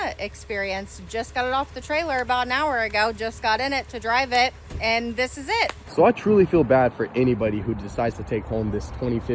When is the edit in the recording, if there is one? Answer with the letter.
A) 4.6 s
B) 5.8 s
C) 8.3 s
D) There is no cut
B